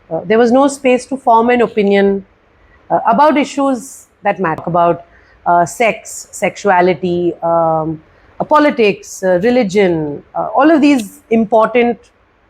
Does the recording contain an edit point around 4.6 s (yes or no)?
yes